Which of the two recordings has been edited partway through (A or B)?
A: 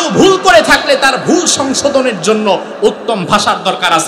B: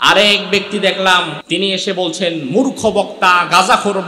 B